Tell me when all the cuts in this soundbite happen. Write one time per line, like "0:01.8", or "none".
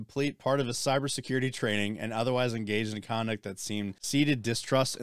0:04.0